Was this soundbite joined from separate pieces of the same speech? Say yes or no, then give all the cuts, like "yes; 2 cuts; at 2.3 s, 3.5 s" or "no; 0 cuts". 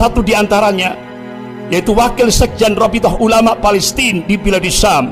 no; 0 cuts